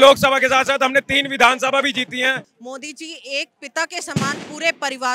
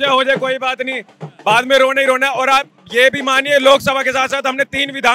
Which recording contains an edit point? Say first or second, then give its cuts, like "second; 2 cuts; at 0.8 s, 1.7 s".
first; 1 cut; at 2.5 s